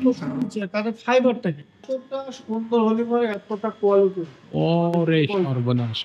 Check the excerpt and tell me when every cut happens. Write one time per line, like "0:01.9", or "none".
0:01.9